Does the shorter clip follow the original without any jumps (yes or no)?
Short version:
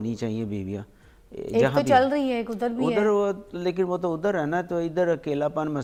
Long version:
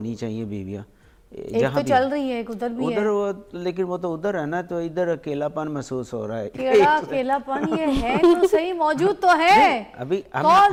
yes